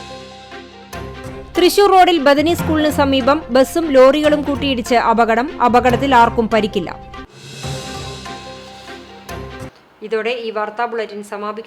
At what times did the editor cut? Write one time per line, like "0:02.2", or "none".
none